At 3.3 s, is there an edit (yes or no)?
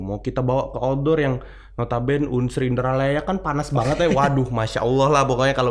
no